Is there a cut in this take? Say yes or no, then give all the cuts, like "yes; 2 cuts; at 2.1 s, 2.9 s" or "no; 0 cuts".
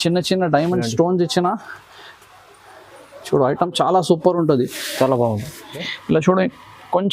yes; 1 cut; at 5.9 s